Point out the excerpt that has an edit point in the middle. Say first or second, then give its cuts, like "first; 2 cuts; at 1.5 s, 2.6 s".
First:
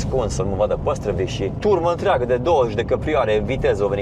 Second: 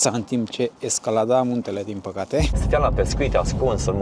second; 1 cut; at 2.6 s